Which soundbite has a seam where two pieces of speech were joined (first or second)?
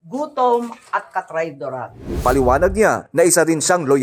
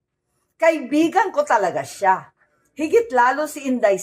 first